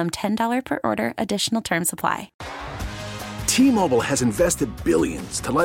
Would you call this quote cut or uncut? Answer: cut